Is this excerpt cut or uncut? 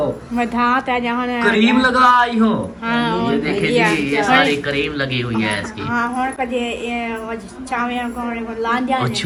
uncut